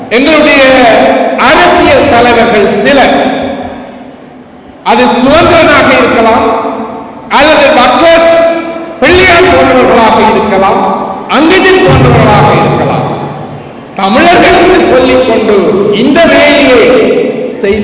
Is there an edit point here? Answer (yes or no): no